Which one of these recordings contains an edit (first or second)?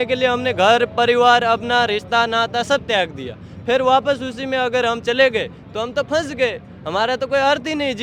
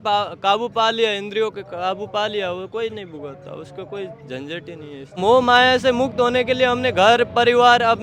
second